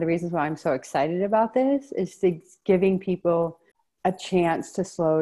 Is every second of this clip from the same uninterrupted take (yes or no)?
yes